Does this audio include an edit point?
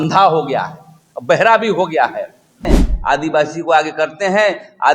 yes; 1 cut; at 2.7 s

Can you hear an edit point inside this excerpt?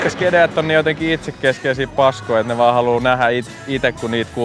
no; 0 cuts

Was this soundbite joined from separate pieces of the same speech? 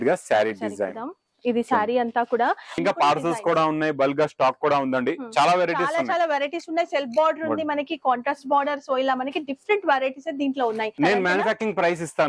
yes; 2 cuts; at 2.8 s, 10.9 s

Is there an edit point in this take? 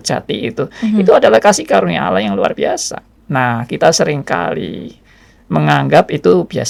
no; 0 cuts

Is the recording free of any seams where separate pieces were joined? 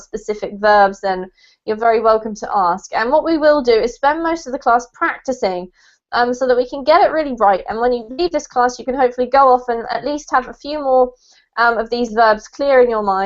no; 1 cut; at 8.8 s

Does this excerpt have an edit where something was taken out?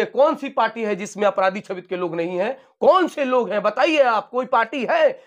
no; 0 cuts

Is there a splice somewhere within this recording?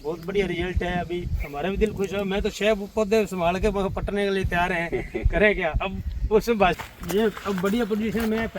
yes; 1 cut; at 6.7 s

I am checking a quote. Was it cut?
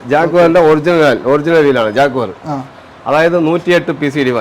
no; 0 cuts

